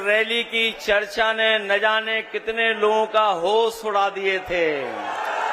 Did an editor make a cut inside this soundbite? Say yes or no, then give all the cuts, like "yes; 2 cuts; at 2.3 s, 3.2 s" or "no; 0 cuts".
no; 0 cuts